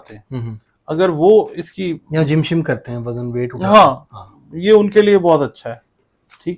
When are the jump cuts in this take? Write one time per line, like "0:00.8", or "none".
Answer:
none